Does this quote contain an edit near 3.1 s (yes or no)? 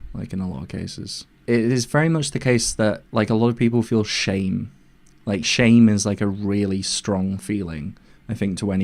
no